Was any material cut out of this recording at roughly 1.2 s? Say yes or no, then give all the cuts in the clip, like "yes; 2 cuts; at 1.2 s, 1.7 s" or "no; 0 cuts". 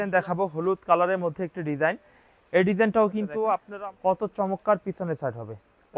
no; 1 cut; at 3.7 s